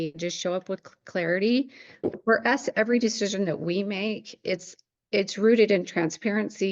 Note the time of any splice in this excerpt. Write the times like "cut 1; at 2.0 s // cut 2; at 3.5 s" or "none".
cut 1; at 2.1 s

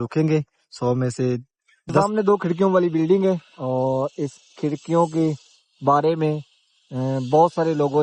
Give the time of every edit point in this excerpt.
cut 1; at 2.0 s

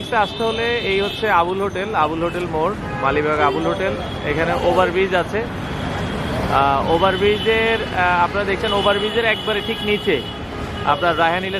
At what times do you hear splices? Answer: none

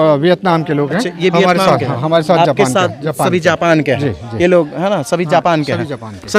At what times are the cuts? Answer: none

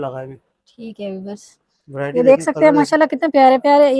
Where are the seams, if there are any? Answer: none

